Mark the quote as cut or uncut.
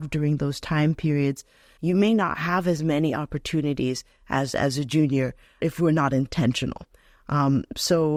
uncut